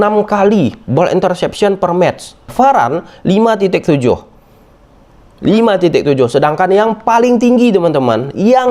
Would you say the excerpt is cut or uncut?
cut